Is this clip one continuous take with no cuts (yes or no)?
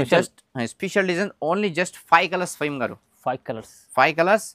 yes